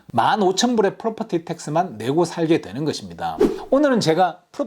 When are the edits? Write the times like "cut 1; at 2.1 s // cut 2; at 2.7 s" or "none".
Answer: cut 1; at 3.5 s